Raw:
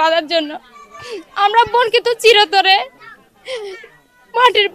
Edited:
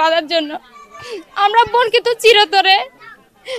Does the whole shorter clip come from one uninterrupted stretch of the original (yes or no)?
yes